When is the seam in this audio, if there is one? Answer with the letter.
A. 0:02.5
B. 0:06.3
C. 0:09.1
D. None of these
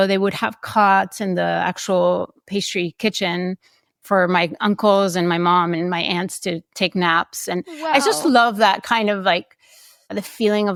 D